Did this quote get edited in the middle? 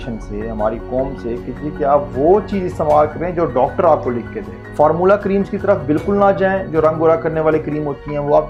no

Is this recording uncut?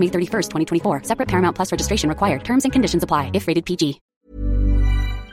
no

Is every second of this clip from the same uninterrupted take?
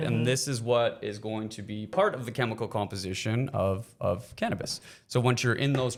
yes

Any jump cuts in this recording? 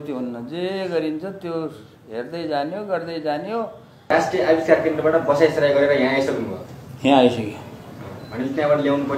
yes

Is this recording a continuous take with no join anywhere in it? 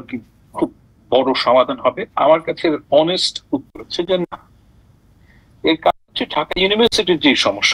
yes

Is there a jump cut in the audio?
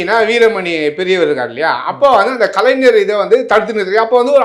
no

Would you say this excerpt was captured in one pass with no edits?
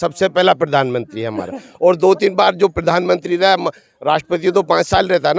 yes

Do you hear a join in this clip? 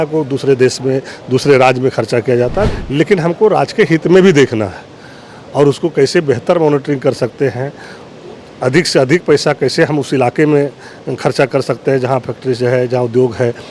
yes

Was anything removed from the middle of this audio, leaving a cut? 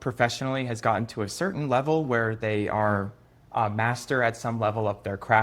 no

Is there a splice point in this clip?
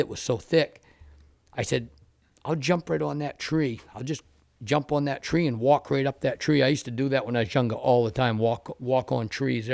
no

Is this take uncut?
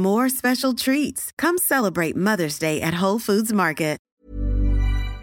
no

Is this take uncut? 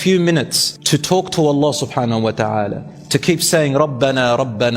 yes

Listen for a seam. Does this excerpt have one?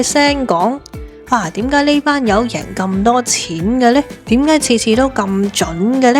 no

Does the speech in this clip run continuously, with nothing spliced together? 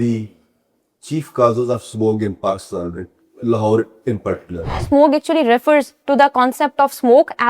no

